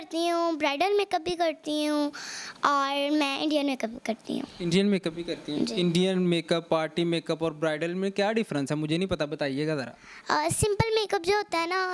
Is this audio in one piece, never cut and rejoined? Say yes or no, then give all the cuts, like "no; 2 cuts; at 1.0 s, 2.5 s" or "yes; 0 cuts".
yes; 0 cuts